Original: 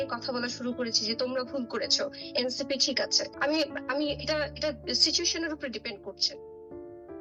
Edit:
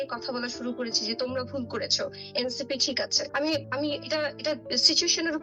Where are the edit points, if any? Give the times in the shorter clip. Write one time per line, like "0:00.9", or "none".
0:03.4